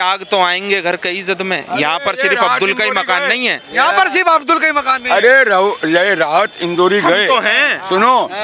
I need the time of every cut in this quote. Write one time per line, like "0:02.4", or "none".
none